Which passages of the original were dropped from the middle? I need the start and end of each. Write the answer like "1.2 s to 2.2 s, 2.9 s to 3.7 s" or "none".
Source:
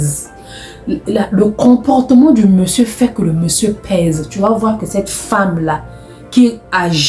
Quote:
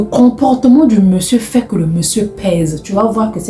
none